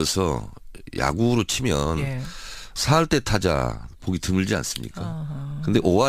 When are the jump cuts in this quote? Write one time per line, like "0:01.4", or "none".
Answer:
0:03.1